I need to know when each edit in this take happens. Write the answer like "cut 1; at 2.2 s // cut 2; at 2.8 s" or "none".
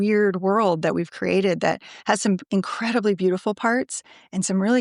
none